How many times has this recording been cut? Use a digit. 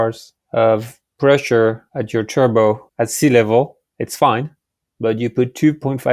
2